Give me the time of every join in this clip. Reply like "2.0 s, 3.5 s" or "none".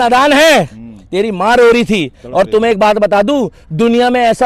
none